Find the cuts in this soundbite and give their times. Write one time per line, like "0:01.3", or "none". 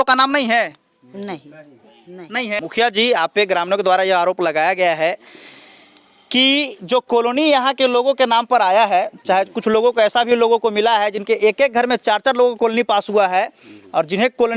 0:02.6

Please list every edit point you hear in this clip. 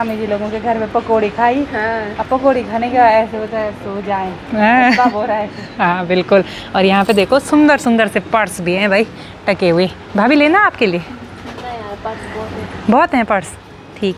none

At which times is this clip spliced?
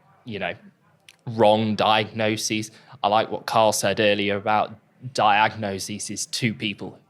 none

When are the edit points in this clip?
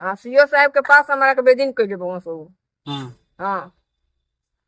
none

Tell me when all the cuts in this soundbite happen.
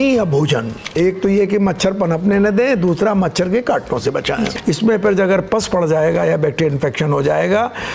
0:01.0
0:04.6

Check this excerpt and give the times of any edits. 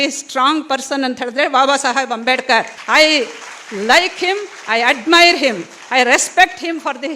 none

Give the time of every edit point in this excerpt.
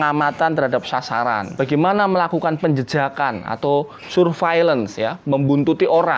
0:01.5

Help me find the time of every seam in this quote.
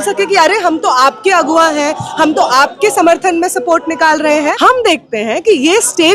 0:04.5

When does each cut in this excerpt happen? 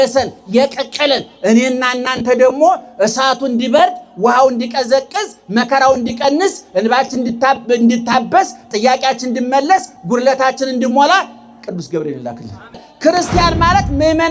0:12.9

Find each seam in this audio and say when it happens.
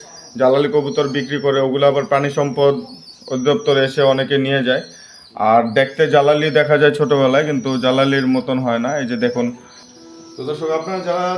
0:09.5

